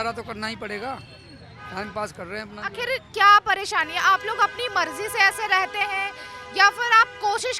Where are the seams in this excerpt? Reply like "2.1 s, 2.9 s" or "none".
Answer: none